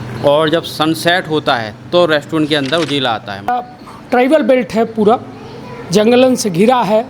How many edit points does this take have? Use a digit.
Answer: 1